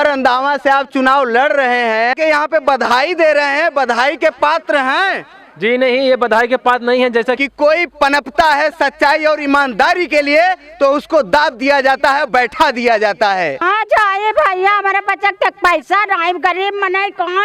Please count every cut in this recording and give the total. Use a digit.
3